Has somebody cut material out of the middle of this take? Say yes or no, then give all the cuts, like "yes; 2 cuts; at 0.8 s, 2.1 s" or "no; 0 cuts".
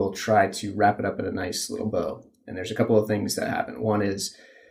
no; 0 cuts